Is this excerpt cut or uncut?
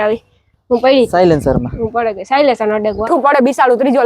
cut